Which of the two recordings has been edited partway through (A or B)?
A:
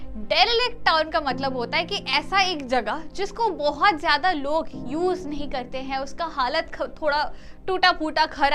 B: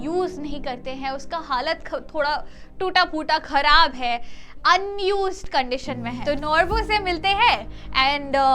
B